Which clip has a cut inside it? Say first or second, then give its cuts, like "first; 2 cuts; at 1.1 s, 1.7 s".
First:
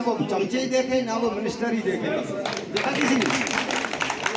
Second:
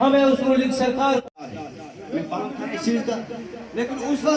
second; 1 cut; at 1.4 s